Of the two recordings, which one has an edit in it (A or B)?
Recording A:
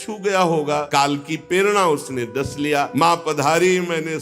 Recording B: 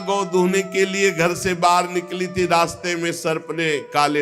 A